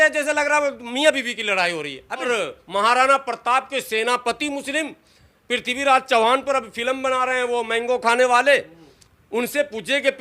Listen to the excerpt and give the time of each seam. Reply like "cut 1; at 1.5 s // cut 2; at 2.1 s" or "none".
cut 1; at 2.2 s